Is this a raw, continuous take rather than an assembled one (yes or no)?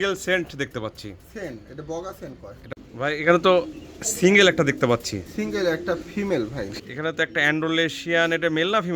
no